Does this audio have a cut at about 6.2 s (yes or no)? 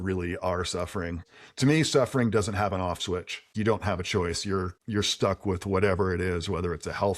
no